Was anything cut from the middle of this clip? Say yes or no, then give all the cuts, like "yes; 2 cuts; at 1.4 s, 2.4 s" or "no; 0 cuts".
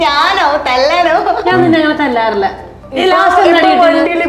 no; 0 cuts